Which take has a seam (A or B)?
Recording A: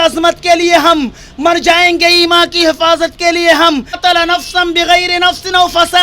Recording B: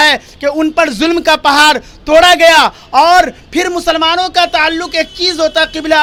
A